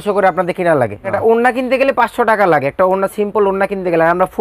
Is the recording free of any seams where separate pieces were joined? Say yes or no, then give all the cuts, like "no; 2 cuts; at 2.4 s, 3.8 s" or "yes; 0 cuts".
no; 1 cut; at 1.1 s